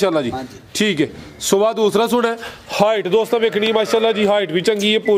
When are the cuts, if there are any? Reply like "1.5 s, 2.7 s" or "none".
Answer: none